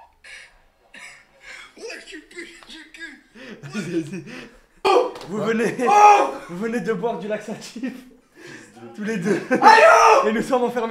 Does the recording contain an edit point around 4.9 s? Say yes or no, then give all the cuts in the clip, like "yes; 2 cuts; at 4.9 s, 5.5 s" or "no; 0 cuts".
yes; 1 cut; at 4.9 s